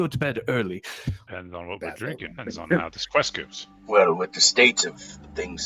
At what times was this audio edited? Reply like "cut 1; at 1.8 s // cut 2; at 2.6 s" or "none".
none